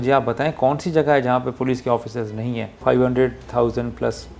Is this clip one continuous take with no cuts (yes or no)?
no